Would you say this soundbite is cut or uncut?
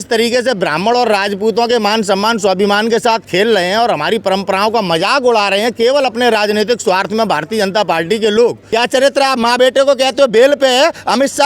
cut